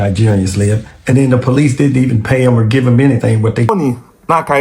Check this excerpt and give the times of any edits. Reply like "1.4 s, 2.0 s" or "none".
3.7 s